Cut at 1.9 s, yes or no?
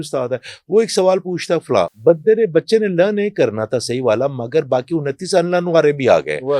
yes